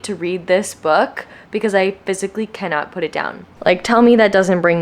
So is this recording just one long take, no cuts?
no; 1 cut; at 3.4 s

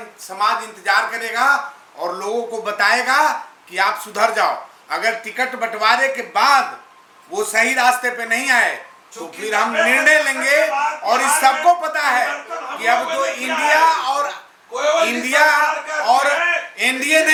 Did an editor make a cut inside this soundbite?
no; 0 cuts

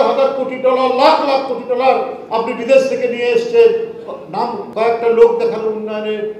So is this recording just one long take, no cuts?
yes; 0 cuts

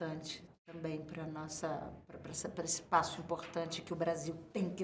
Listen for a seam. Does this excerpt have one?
no; 0 cuts

